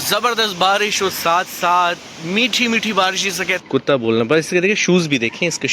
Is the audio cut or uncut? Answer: cut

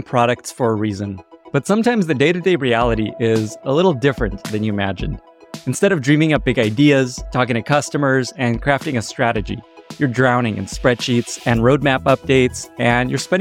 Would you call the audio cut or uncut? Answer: uncut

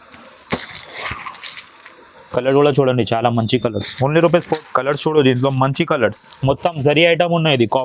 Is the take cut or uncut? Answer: cut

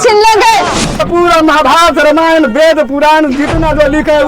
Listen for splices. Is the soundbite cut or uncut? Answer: cut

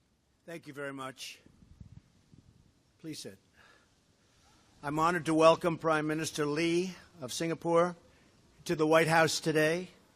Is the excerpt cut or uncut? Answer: uncut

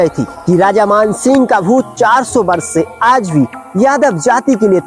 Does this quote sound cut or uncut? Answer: uncut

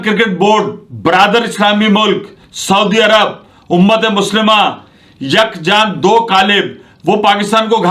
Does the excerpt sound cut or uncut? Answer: uncut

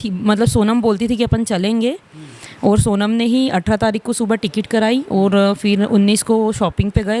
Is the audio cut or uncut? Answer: uncut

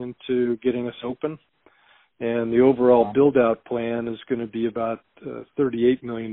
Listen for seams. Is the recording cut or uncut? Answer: uncut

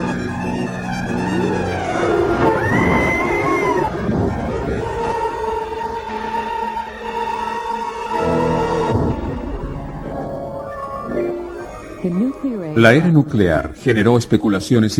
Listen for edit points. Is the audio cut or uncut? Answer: uncut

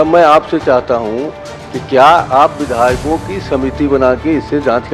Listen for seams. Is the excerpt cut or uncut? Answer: uncut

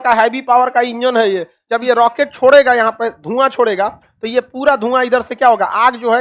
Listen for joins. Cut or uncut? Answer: cut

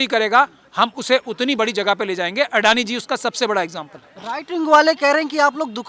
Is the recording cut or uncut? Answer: uncut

